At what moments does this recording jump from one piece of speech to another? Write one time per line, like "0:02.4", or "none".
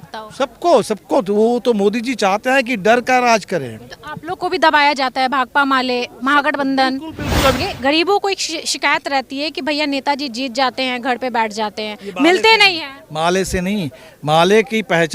0:07.6